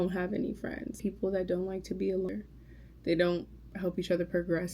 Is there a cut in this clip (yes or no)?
yes